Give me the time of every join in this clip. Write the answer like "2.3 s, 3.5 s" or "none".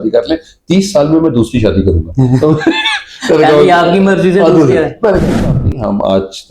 5.4 s